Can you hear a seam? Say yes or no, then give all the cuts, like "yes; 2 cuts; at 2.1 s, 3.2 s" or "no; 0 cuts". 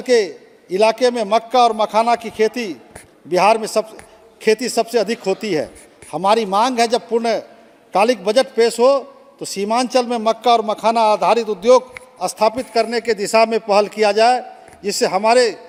no; 0 cuts